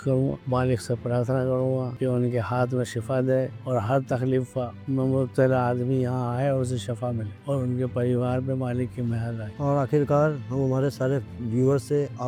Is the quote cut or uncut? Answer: uncut